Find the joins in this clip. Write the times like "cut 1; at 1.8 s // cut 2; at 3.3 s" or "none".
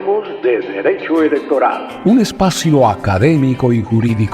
cut 1; at 1.9 s